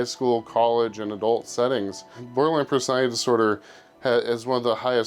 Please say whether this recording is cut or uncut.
cut